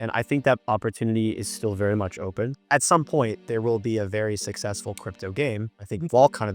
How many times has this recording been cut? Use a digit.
1